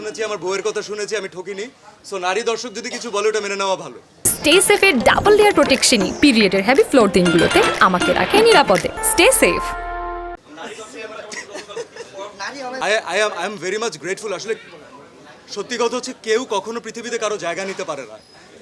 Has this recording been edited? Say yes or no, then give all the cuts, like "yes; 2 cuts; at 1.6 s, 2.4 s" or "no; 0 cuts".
no; 0 cuts